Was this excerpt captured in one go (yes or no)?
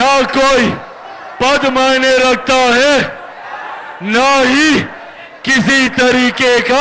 yes